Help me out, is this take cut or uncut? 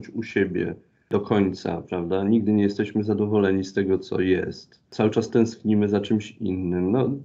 cut